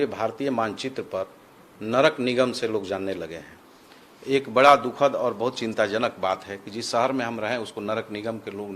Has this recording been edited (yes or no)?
no